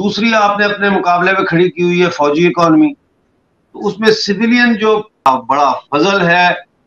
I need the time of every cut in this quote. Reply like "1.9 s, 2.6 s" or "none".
5.2 s